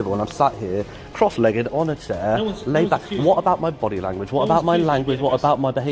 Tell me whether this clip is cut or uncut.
uncut